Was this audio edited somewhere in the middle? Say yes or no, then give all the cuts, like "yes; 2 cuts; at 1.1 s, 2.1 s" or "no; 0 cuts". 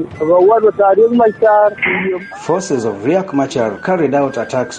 yes; 1 cut; at 2.1 s